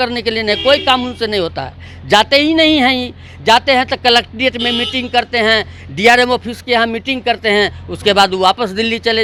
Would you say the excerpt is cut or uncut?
uncut